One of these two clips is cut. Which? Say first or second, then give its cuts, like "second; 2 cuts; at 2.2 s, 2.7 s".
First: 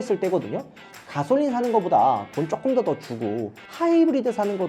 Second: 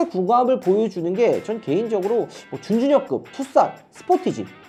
first; 2 cuts; at 0.9 s, 3.6 s